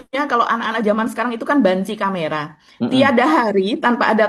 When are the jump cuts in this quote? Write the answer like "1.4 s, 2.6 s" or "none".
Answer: none